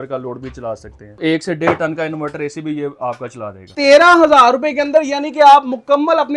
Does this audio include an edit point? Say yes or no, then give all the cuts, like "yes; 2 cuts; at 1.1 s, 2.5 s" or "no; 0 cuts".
yes; 2 cuts; at 1.2 s, 3.7 s